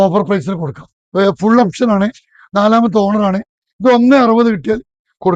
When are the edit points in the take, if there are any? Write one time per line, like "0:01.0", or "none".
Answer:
0:01.0